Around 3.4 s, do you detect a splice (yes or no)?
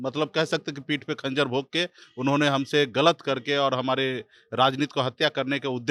no